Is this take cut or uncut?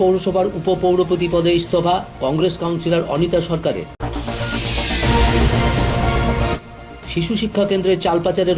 uncut